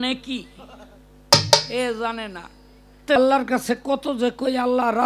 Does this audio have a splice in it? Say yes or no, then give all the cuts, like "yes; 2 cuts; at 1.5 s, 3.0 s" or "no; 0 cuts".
yes; 1 cut; at 3.2 s